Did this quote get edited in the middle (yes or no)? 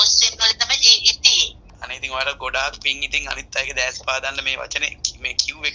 yes